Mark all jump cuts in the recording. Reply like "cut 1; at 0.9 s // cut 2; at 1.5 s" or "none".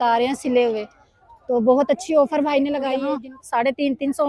cut 1; at 2.9 s